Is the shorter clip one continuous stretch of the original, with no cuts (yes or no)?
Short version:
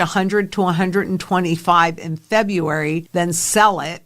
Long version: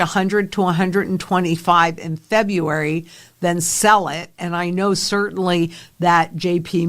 no